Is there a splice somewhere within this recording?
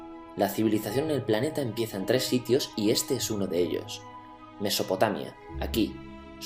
yes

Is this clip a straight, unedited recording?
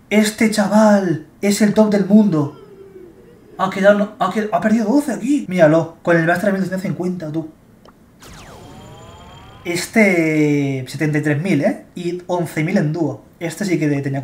yes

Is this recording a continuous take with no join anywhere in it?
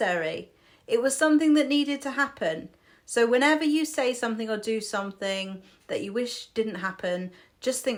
yes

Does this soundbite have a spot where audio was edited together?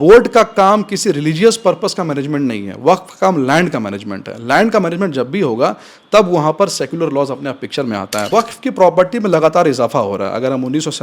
yes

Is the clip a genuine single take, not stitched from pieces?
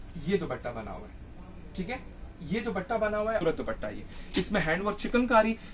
no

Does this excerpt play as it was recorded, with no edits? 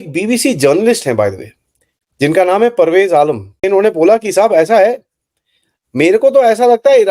no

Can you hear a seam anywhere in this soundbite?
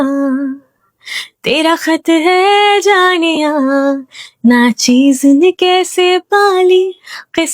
no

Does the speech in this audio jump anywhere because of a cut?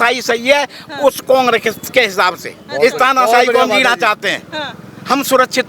no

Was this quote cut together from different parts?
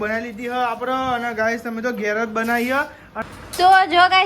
yes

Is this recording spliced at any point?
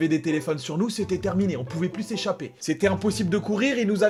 no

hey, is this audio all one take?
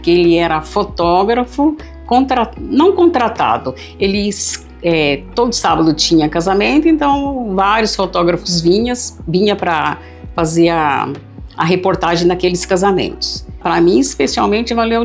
no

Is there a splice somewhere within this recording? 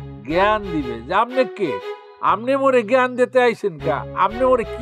yes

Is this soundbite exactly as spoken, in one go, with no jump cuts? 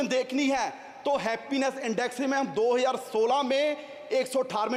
yes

